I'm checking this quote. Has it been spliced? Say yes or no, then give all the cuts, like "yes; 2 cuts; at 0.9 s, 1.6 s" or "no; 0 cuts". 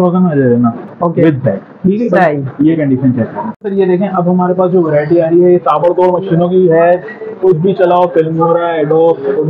yes; 1 cut; at 3.6 s